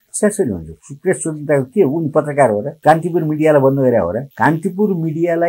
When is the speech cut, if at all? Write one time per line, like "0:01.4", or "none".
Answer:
0:02.7
0:04.2